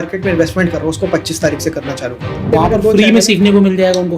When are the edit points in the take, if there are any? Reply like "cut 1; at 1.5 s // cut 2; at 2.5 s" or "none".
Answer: cut 1; at 2.5 s